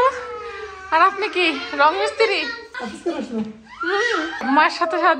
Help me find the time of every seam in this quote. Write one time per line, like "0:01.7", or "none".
0:02.7
0:04.4